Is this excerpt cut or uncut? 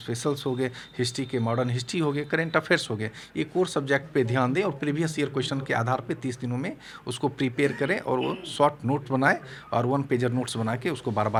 uncut